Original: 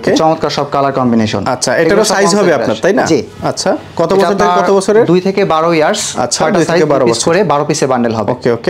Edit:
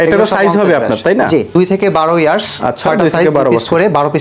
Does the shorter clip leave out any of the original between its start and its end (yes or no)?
yes